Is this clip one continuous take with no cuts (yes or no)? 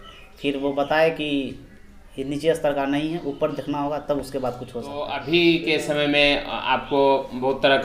no